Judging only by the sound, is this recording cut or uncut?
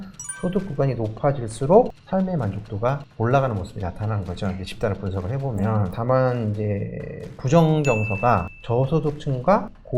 uncut